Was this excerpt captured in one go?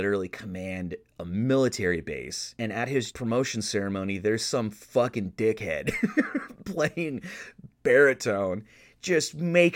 no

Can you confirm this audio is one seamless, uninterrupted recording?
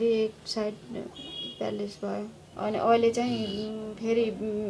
no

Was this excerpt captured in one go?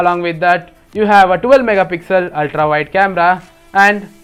yes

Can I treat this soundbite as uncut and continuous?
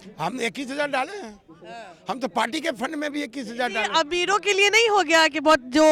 yes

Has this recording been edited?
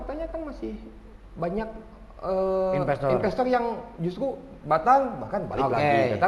no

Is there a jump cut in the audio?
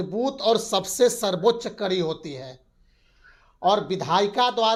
no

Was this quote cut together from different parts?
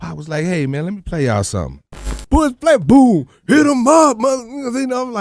yes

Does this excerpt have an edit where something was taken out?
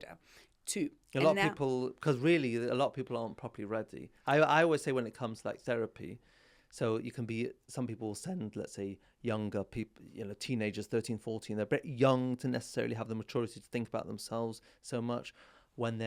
no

